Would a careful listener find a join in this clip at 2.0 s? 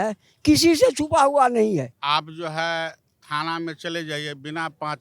yes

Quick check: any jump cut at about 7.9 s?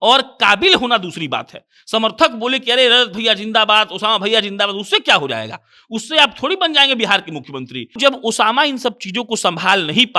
yes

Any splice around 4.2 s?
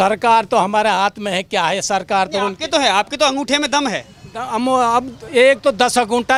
no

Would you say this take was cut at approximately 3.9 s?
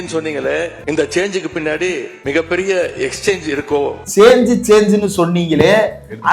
yes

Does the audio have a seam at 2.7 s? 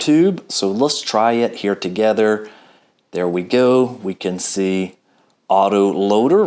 no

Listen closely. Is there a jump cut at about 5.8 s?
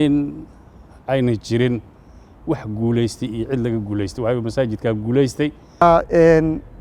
yes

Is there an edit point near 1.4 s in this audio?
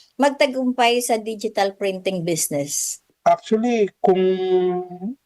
no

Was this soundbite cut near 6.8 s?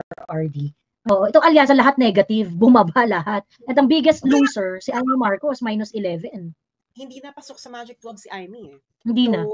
yes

